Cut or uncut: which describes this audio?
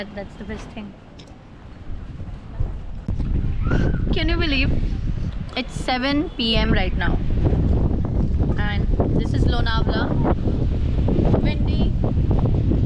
cut